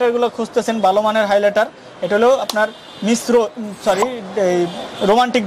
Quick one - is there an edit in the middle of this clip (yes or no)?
no